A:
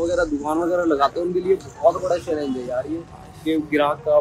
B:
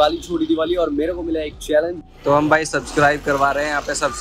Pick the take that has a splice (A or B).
B